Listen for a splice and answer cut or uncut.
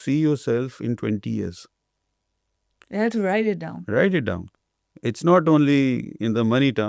uncut